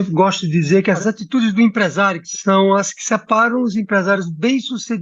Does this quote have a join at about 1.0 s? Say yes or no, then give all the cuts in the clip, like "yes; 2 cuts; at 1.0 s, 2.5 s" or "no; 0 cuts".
yes; 2 cuts; at 1.0 s, 2.3 s